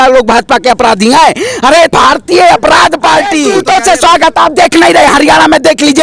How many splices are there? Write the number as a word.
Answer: two